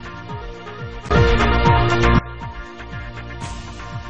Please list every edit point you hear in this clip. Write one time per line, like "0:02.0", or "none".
0:01.0